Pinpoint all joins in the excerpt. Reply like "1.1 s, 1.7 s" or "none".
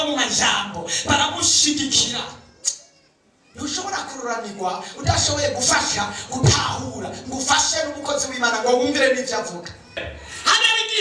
10.0 s